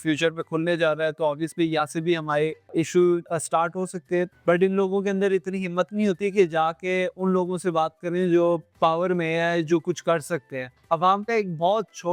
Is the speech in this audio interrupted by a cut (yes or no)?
yes